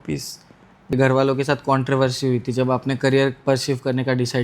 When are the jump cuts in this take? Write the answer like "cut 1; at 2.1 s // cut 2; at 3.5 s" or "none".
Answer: cut 1; at 0.9 s